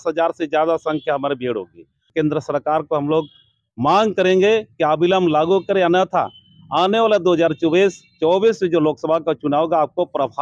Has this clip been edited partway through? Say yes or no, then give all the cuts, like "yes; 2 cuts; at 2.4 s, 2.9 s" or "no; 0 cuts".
yes; 1 cut; at 2.0 s